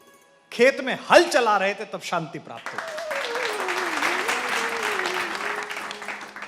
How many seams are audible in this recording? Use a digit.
0